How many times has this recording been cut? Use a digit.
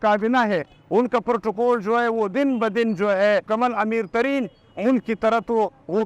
1